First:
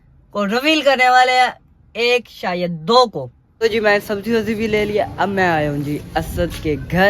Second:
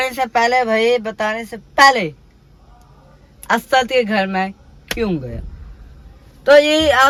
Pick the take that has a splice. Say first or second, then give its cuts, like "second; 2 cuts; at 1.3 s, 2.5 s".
first; 1 cut; at 3.4 s